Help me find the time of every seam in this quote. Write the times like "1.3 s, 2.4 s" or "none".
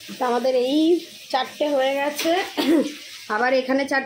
none